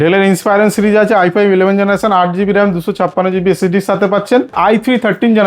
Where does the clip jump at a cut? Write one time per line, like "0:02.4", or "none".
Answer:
0:04.5